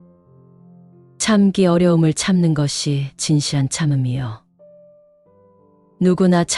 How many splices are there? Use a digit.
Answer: 1